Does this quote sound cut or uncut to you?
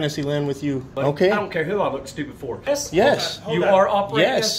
cut